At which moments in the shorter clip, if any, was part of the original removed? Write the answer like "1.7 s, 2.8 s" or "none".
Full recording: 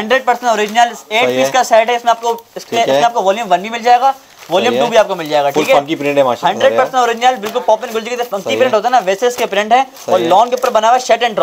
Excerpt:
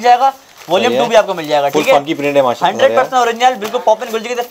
none